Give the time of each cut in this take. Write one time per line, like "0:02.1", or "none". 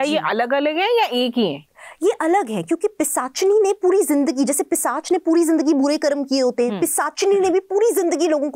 none